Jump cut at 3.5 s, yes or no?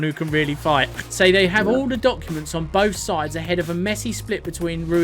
no